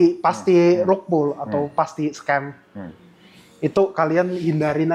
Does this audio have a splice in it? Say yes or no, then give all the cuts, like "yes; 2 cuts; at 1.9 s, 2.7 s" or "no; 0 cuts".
no; 0 cuts